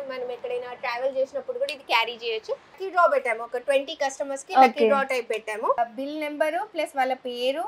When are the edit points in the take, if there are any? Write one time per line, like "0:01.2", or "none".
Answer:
0:02.8
0:05.8